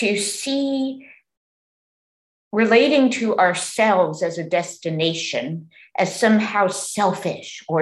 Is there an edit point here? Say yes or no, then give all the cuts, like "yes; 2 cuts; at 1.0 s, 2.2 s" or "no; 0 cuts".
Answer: no; 0 cuts